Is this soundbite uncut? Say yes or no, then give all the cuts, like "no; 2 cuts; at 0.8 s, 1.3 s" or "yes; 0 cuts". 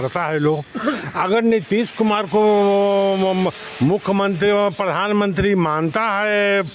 yes; 0 cuts